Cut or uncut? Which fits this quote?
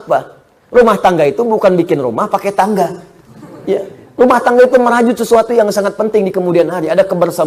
uncut